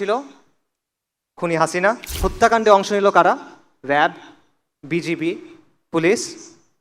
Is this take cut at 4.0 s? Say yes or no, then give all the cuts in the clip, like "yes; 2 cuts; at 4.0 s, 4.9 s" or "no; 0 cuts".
no; 1 cut; at 2.1 s